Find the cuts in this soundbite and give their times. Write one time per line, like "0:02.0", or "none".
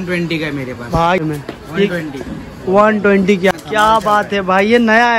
0:01.2
0:03.5

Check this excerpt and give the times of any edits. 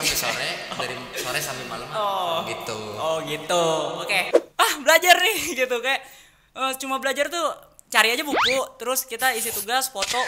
0:04.4

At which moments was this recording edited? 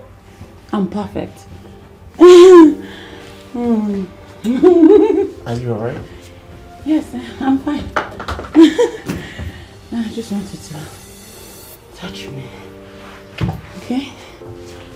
none

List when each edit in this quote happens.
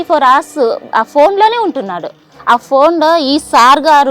0:02.3

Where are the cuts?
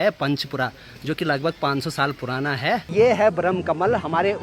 0:02.9

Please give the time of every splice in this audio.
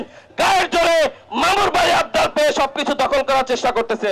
none

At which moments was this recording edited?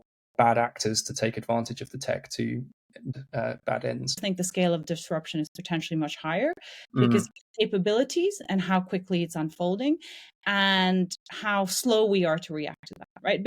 0:03.1
0:04.1

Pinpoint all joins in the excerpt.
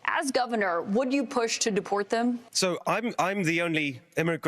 0:02.5

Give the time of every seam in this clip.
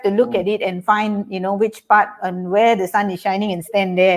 none

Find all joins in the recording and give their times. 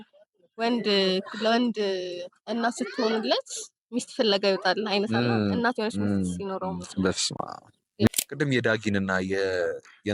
0:08.1

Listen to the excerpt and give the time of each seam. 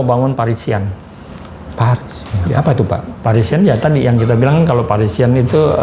none

